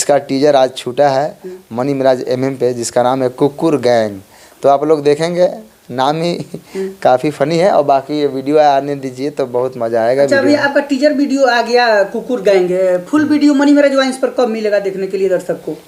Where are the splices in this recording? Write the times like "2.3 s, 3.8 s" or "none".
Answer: none